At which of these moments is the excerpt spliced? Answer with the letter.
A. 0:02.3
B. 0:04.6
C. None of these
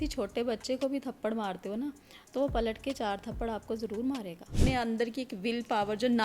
B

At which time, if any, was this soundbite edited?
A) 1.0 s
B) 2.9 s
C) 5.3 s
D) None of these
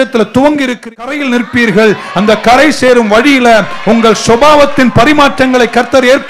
A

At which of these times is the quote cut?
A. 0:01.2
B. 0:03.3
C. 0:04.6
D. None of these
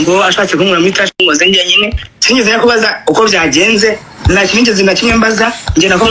A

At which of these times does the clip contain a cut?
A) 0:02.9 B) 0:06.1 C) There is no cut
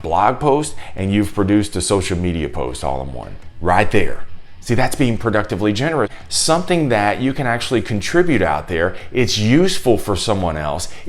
B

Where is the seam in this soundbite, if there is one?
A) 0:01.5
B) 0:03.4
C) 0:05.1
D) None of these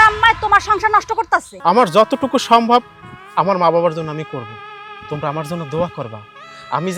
A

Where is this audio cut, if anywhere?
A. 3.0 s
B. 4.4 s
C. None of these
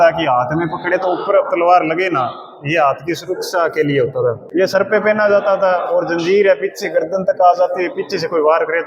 B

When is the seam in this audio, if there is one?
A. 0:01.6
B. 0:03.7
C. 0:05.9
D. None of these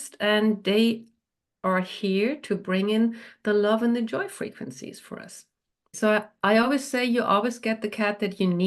C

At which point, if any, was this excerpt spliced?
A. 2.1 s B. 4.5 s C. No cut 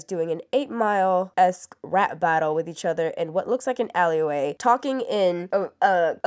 C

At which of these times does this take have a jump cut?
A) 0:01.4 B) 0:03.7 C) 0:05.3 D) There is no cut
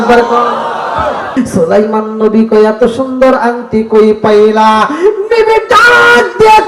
A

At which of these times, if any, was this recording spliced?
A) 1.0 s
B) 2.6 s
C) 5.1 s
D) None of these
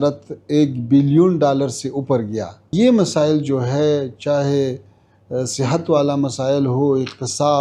B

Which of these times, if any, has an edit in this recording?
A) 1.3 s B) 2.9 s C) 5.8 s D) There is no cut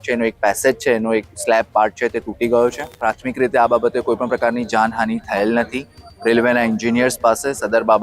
B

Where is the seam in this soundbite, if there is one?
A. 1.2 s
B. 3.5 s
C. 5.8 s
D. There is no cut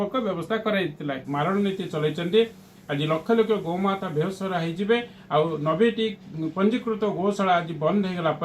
A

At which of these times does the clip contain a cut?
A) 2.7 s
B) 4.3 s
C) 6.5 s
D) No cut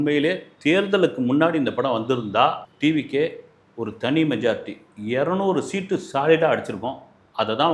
A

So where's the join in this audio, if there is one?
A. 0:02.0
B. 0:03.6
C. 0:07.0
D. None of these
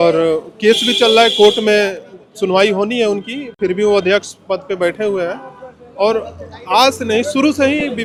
D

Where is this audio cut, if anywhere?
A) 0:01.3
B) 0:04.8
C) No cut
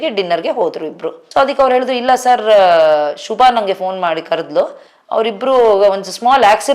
A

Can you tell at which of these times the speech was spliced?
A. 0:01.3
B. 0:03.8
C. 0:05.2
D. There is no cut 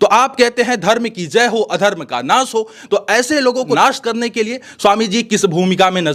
B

